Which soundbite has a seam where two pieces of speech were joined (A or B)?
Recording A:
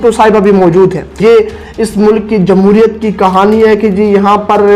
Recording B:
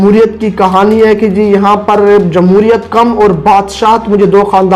A